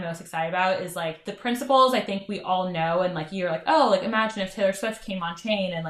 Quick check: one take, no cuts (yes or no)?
no